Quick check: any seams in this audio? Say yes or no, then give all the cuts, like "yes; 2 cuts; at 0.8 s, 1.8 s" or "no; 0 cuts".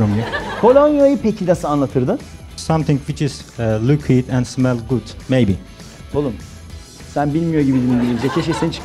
yes; 2 cuts; at 2.5 s, 5.1 s